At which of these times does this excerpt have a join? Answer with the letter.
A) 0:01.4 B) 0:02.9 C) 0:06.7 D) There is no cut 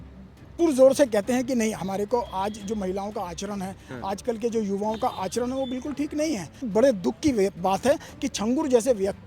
C